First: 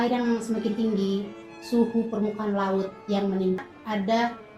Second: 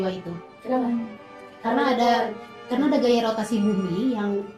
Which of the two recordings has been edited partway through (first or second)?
first